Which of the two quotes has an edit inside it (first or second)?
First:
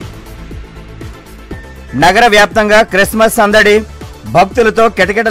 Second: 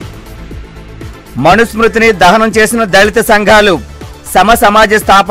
second